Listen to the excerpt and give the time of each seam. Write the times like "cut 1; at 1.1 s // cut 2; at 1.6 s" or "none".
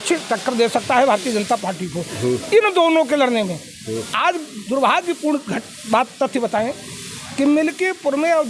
none